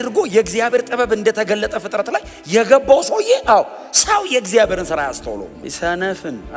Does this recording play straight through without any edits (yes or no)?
no